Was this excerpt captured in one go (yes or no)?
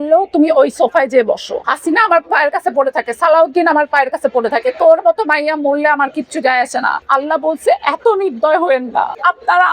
no